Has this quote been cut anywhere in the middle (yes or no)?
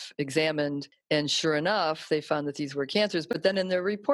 yes